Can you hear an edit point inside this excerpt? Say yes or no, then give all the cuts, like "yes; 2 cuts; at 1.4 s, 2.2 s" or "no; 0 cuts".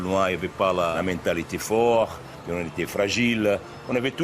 yes; 2 cuts; at 0.9 s, 2.3 s